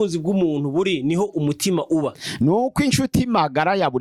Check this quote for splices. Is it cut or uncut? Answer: uncut